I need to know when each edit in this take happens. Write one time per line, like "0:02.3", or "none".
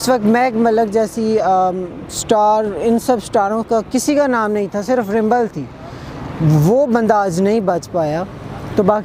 none